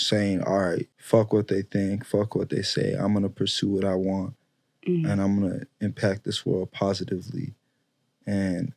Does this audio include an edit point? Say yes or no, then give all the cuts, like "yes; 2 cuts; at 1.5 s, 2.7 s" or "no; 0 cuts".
yes; 1 cut; at 0.9 s